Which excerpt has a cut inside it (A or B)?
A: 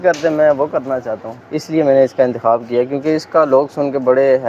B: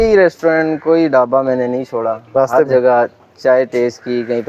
A